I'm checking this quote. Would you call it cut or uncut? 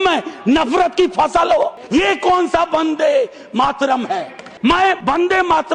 cut